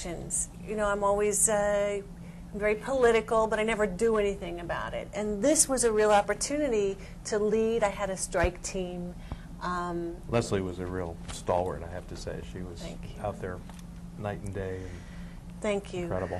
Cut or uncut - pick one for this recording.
cut